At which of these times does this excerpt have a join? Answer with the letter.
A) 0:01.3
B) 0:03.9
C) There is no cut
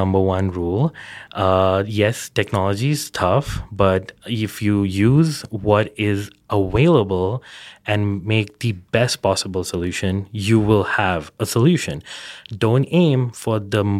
C